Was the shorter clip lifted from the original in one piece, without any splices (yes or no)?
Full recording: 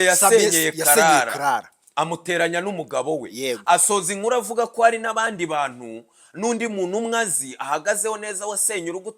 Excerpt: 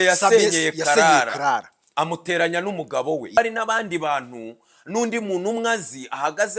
no